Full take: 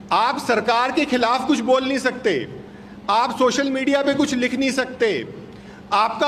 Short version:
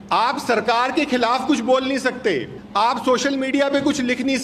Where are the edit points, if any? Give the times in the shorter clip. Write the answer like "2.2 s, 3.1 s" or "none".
2.6 s